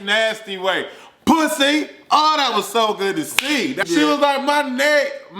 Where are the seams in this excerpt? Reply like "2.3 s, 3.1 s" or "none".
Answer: 3.8 s